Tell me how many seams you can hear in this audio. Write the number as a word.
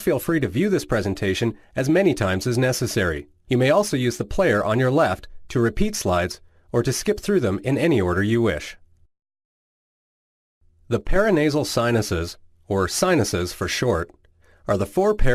zero